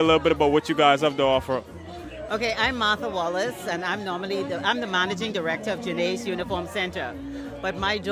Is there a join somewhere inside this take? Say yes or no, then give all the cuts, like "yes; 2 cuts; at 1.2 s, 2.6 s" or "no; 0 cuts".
no; 0 cuts